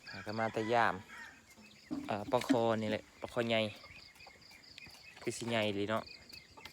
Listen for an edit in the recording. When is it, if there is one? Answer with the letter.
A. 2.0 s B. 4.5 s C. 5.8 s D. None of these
A